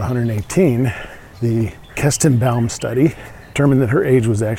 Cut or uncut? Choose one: cut